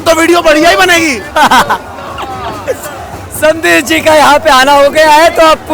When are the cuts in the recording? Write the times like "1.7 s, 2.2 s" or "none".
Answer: none